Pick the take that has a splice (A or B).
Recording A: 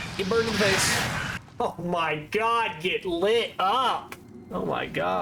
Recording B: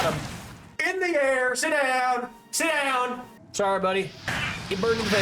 B